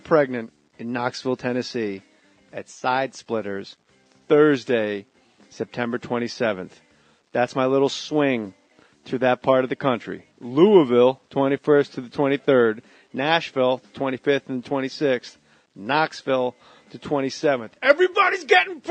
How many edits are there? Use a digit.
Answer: 1